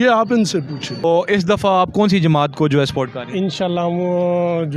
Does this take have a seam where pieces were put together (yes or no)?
yes